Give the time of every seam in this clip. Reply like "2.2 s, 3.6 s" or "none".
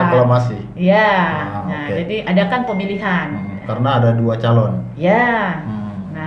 none